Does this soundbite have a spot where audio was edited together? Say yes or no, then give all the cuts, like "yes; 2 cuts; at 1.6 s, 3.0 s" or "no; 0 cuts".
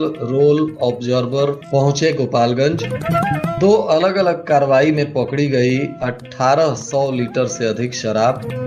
no; 0 cuts